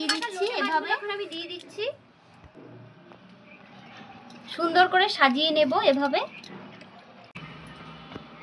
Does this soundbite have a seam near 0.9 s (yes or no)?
yes